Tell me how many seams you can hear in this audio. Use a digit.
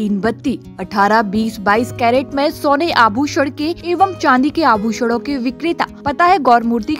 2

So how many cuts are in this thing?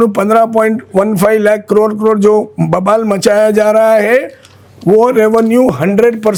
0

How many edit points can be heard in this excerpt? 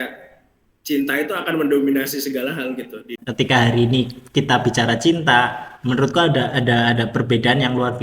1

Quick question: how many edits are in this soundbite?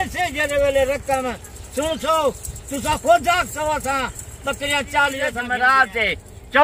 1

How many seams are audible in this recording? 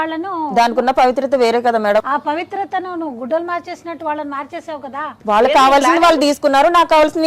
2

